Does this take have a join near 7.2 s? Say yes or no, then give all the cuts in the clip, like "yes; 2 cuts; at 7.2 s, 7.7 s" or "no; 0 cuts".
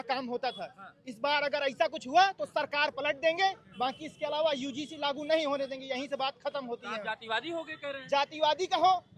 no; 0 cuts